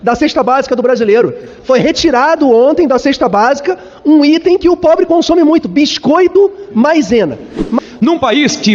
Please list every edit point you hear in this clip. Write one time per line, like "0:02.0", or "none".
0:07.8